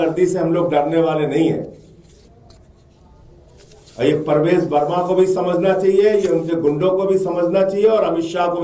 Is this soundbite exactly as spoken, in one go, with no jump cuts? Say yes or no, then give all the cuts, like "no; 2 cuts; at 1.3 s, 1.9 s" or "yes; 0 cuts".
yes; 0 cuts